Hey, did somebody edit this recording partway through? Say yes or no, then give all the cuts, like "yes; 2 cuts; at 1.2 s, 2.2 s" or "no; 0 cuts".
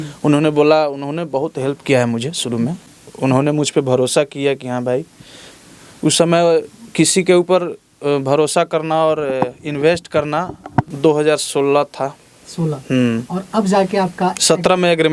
yes; 2 cuts; at 2.8 s, 10.9 s